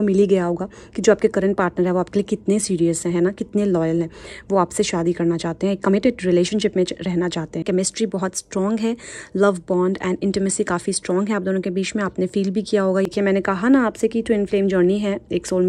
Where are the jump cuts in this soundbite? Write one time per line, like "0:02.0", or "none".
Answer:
0:07.6
0:13.1